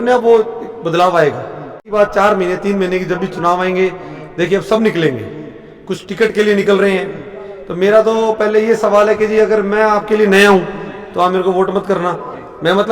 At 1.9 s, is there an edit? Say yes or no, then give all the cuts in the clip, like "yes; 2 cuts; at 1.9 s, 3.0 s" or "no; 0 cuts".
yes; 1 cut; at 1.9 s